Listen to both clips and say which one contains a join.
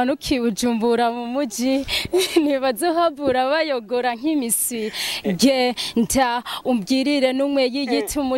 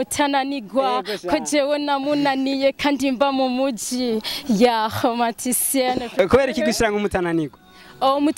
second; 1 cut; at 6.1 s

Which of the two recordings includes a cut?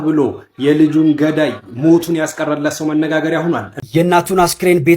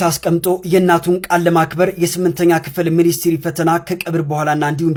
first; 1 cut; at 3.7 s

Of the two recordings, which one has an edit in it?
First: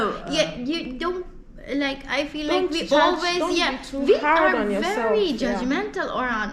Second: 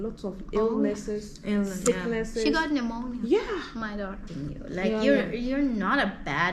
second; 1 cut; at 4.3 s

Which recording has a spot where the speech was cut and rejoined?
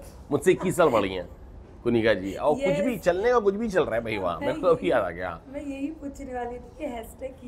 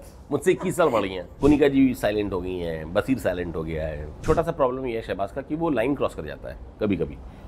second; 2 cuts; at 1.3 s, 4.2 s

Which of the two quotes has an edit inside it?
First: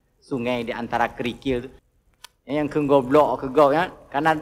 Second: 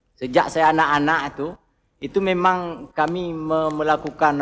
first; 1 cut; at 1.8 s

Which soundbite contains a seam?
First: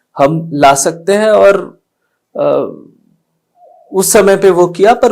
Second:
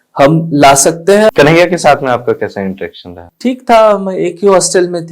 second; 1 cut; at 1.3 s

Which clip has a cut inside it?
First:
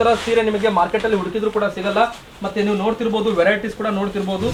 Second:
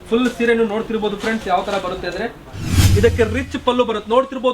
second; 1 cut; at 2.8 s

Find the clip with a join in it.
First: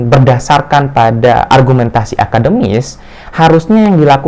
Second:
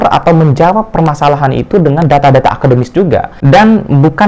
second; 1 cut; at 3.3 s

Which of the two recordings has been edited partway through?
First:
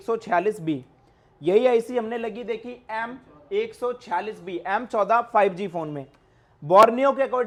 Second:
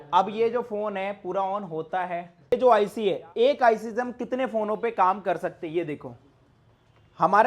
second; 1 cut; at 2.5 s

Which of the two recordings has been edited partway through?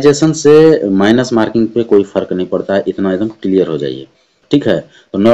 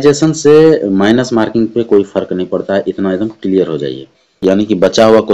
second; 1 cut; at 4.4 s

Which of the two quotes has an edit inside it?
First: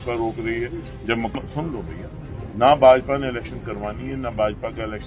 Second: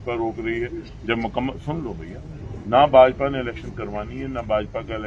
first; 1 cut; at 1.4 s

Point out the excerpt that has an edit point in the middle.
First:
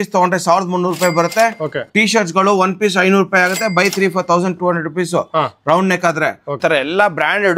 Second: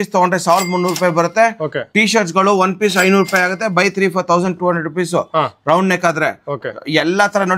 first; 1 cut; at 6.6 s

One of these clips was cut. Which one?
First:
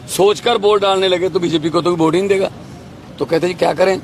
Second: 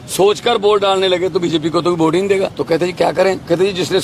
second; 1 cut; at 2.6 s

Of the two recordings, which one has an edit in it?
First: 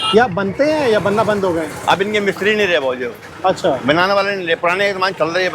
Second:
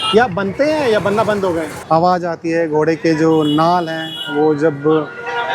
second; 1 cut; at 1.7 s

